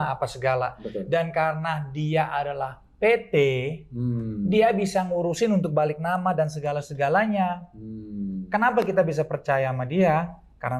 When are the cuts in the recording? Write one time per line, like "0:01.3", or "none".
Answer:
none